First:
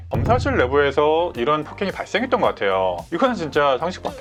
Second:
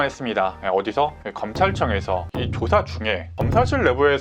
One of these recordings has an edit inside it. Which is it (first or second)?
second